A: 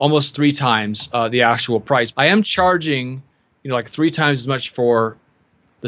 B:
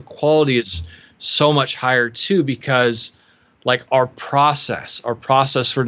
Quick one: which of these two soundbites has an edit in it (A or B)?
A